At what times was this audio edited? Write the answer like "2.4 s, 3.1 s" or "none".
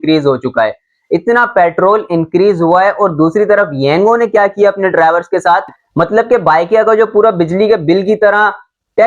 5.8 s